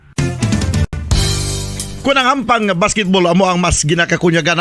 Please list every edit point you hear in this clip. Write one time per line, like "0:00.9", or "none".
0:00.9